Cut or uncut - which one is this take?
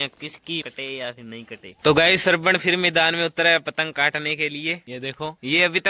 uncut